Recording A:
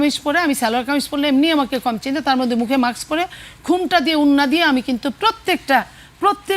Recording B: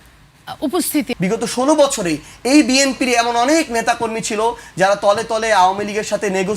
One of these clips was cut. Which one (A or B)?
B